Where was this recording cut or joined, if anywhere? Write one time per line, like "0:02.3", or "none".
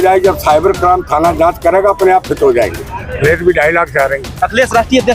0:03.2